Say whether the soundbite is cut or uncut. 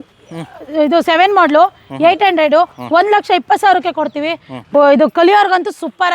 cut